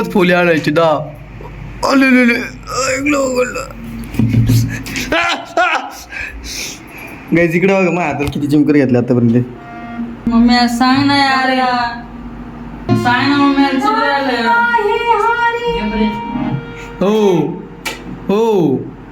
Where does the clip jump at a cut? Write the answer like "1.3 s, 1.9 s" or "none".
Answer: 7.2 s, 10.3 s, 12.9 s